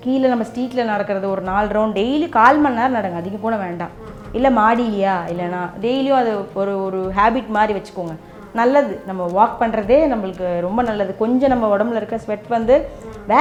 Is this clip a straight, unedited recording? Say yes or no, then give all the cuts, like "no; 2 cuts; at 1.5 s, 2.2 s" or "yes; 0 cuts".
yes; 0 cuts